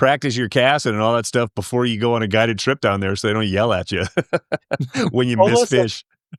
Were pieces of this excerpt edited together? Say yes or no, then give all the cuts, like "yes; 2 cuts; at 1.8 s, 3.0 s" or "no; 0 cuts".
no; 0 cuts